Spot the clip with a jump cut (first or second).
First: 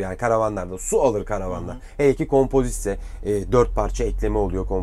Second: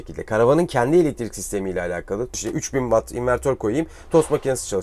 second